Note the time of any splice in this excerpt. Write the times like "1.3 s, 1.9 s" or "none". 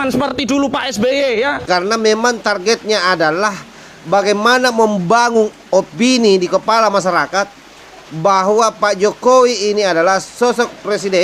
1.6 s